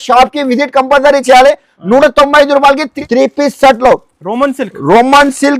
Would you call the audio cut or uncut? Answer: cut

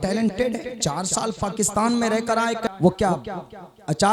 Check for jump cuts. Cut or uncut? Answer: cut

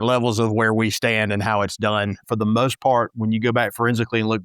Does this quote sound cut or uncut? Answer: cut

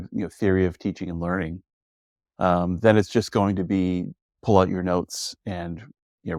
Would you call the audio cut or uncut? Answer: uncut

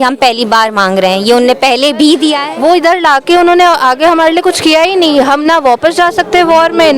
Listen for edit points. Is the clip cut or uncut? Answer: cut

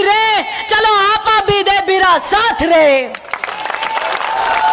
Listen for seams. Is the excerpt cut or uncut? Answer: uncut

